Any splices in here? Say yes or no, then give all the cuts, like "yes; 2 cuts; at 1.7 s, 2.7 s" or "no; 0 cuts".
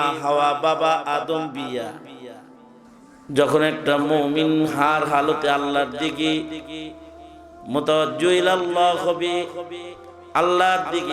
yes; 1 cut; at 3.0 s